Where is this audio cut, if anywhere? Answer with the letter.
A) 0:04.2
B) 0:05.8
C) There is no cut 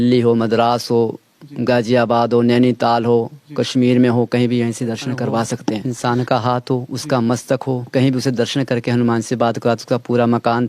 B